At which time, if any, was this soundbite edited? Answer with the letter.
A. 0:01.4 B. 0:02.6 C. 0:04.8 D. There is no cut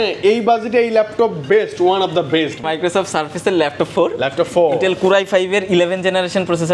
B